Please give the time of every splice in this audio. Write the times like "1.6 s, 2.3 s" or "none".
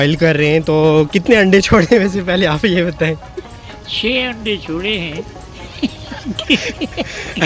none